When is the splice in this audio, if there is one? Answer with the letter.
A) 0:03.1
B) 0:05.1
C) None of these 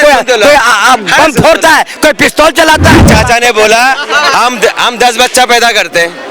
A